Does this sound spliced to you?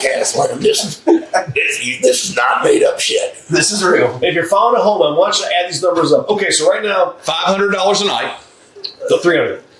no; 0 cuts

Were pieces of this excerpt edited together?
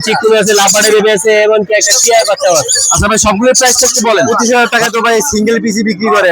yes; 1 cut; at 4.4 s

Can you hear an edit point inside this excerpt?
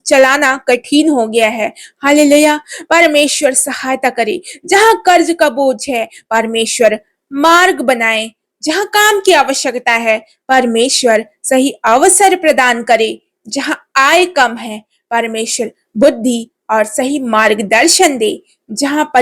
no; 0 cuts

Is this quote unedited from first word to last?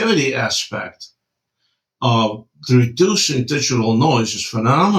yes; 0 cuts

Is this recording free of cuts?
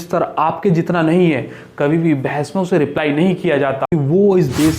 no; 1 cut; at 3.9 s

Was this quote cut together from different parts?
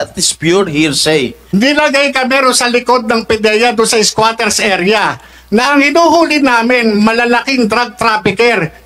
yes; 1 cut; at 1.4 s

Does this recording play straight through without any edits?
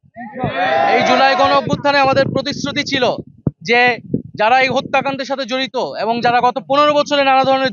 yes; 0 cuts

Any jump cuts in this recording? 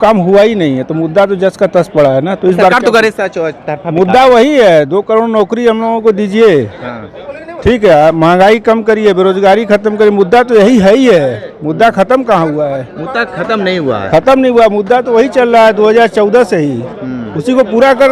no; 0 cuts

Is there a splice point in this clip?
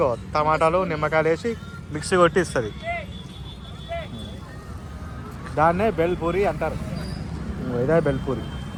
no; 0 cuts

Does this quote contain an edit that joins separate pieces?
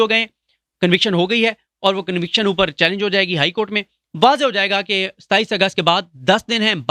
no; 0 cuts

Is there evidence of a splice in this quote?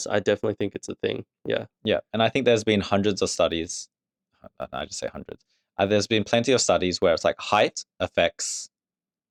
no; 0 cuts

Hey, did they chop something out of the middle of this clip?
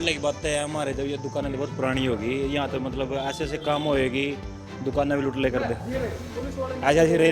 no; 0 cuts

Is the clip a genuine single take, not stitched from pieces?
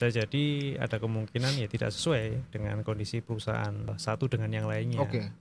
no; 1 cut; at 3.9 s

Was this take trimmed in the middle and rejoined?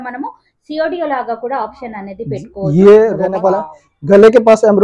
yes; 1 cut; at 3.2 s

